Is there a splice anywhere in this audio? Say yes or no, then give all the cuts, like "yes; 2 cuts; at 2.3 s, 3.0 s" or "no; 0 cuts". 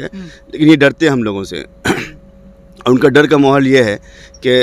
no; 0 cuts